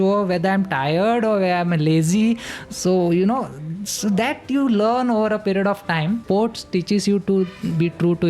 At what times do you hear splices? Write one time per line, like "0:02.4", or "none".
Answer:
0:06.2